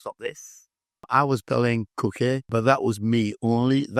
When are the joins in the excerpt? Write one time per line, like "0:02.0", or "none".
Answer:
0:01.0
0:02.5